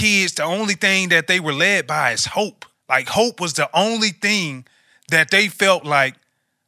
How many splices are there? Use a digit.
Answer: 1